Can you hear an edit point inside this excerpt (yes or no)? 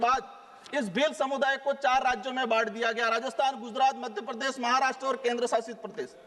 no